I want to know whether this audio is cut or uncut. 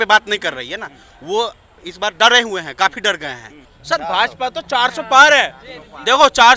cut